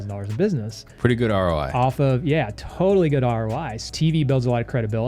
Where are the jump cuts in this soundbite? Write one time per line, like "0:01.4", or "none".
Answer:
0:03.9